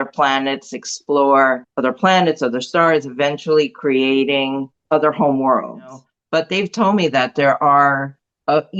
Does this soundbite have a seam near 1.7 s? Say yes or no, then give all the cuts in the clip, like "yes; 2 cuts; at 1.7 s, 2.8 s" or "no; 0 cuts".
yes; 3 cuts; at 1.7 s, 4.7 s, 6.1 s